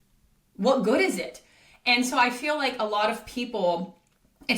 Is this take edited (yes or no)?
no